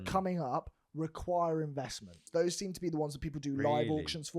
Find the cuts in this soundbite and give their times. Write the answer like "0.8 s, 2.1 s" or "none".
2.2 s